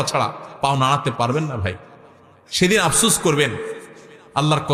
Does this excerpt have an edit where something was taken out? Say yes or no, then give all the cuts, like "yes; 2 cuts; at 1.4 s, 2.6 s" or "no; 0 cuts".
no; 0 cuts